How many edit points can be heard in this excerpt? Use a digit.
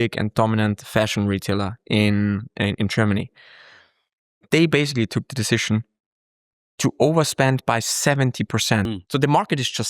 1